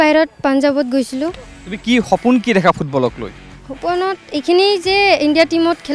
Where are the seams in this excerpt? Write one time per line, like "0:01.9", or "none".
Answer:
0:01.5